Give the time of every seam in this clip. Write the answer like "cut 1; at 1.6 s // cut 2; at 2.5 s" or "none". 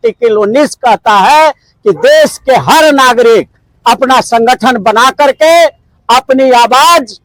none